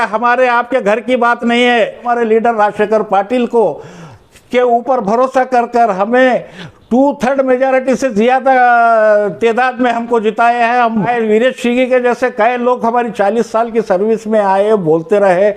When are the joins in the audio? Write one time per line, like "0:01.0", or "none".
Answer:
0:02.0
0:11.1